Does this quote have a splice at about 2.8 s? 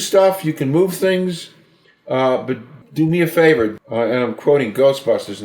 yes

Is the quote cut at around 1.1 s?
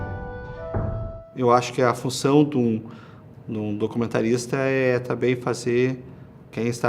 yes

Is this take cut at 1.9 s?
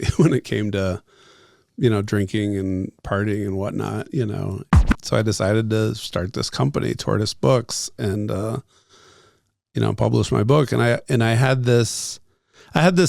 no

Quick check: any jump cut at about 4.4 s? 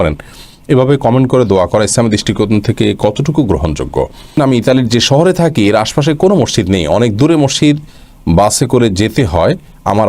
yes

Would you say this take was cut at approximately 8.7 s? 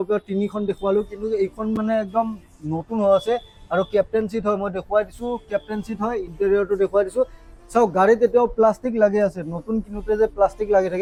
no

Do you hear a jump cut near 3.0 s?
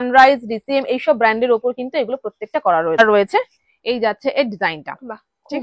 yes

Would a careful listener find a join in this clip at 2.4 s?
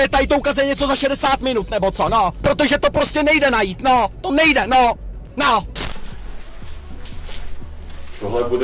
yes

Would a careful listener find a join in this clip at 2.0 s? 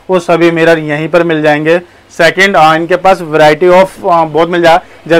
no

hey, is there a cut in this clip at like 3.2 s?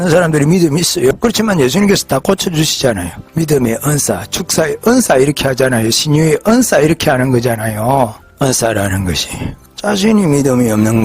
yes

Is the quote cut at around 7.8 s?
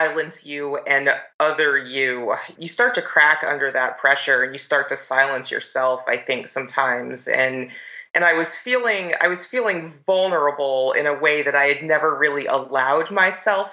no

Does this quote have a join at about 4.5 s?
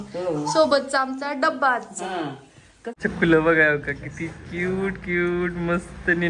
no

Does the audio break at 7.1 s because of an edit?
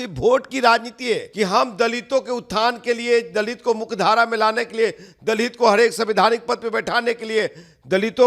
no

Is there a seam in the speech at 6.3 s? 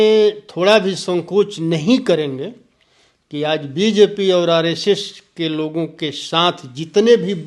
no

